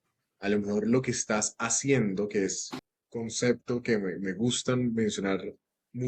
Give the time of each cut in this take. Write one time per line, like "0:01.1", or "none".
none